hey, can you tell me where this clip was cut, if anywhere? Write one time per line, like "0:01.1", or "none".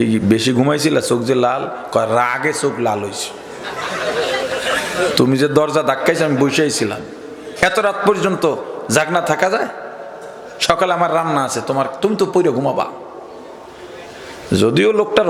none